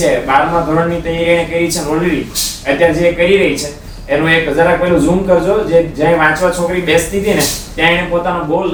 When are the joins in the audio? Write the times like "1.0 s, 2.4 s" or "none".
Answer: none